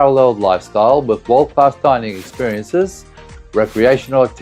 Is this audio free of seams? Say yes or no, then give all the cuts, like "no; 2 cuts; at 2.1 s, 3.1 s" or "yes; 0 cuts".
no; 1 cut; at 3.2 s